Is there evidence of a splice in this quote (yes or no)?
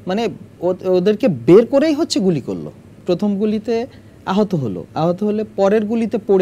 yes